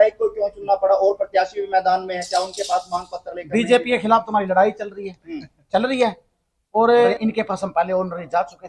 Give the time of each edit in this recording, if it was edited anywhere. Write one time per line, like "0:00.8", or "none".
0:07.1